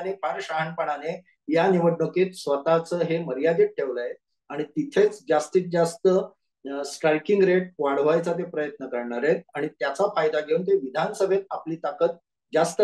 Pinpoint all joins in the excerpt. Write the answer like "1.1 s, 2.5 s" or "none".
none